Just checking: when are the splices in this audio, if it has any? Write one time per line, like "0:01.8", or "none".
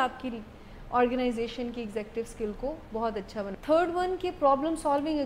0:03.6